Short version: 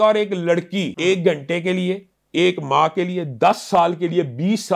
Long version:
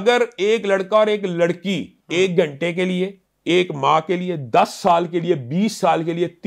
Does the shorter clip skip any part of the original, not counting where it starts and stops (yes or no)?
yes